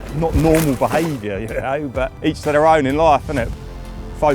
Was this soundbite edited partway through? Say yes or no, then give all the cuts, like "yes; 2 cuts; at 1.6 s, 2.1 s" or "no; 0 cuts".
yes; 2 cuts; at 2.1 s, 3.5 s